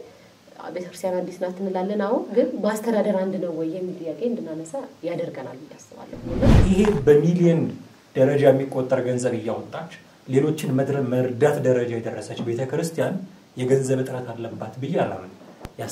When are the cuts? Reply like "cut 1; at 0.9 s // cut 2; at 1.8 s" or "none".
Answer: cut 1; at 6.5 s